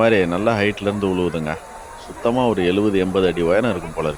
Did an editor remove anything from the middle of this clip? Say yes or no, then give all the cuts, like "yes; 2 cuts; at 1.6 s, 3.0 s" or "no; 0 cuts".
no; 0 cuts